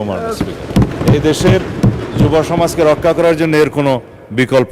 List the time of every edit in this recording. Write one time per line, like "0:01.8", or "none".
0:00.9